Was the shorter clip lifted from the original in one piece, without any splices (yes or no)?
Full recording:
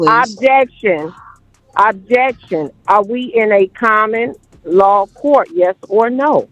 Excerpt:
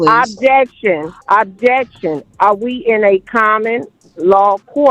no